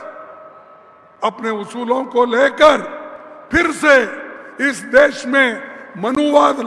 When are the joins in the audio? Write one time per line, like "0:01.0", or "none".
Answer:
none